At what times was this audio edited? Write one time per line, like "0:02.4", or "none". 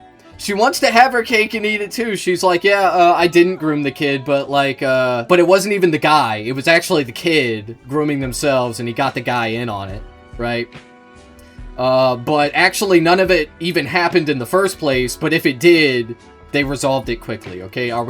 0:05.2